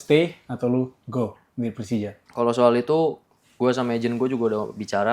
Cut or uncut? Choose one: cut